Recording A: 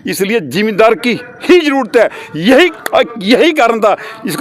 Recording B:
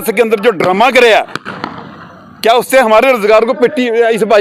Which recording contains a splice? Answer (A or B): A